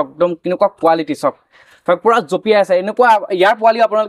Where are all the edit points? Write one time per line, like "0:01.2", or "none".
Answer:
none